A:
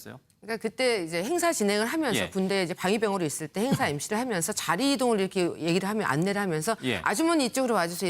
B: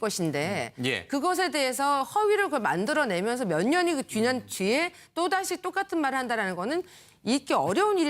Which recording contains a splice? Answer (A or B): A